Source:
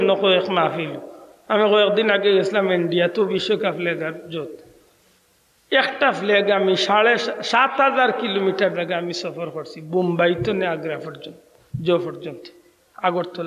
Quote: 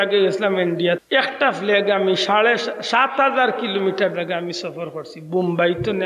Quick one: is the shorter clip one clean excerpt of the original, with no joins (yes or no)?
no